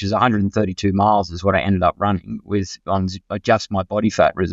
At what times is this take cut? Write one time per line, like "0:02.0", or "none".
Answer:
none